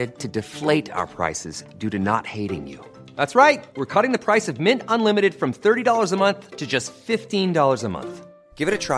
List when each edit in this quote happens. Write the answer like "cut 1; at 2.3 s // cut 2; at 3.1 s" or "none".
none

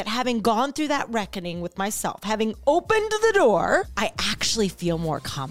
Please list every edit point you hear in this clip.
cut 1; at 3.9 s

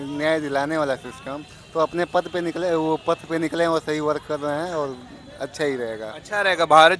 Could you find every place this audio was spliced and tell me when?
none

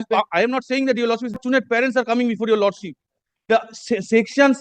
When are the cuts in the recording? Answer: cut 1; at 1.4 s

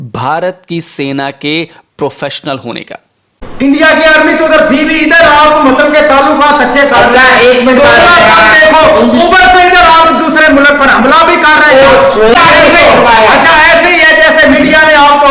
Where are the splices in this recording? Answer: cut 1; at 3.4 s // cut 2; at 12.3 s

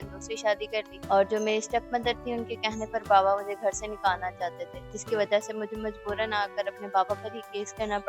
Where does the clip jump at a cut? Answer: cut 1; at 0.9 s

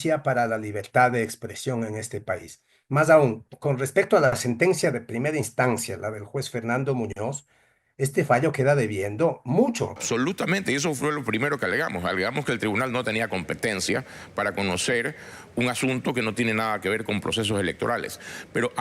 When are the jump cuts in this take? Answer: cut 1; at 10.0 s

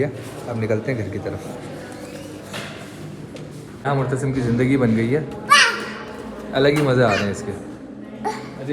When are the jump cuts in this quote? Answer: cut 1; at 3.8 s

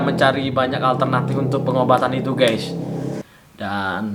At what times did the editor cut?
cut 1; at 3.2 s

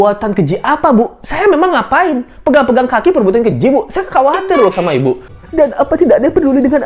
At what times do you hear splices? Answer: cut 1; at 5.3 s

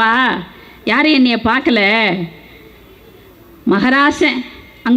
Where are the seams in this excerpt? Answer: none

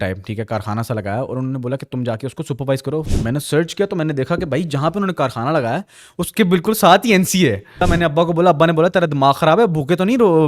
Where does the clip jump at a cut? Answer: cut 1; at 3.1 s // cut 2; at 7.9 s

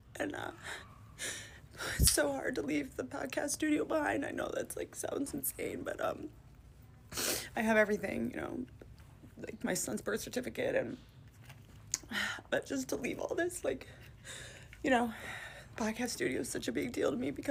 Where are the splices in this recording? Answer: none

